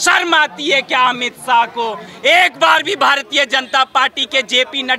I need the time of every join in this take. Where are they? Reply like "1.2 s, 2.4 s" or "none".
none